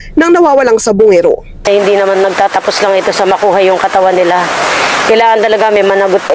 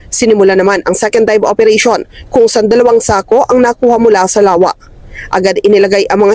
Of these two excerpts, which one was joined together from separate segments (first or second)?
first